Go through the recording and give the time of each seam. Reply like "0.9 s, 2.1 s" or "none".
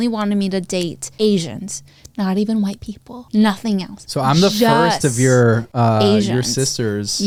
none